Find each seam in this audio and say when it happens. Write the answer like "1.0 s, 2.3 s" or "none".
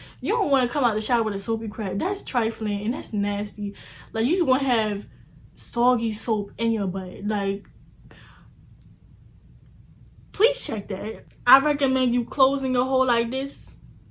11.2 s